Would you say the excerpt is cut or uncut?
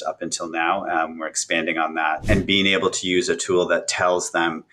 cut